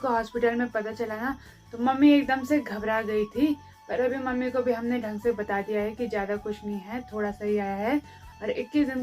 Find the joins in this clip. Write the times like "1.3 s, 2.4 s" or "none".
none